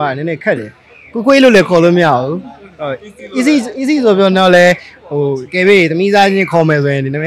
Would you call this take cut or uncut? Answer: uncut